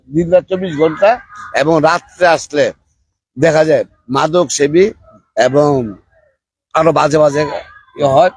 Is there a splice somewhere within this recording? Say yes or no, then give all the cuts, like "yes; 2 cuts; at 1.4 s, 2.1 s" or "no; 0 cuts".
no; 0 cuts